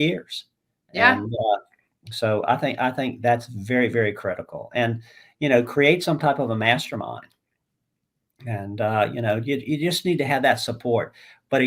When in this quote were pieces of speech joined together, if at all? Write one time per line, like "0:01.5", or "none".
none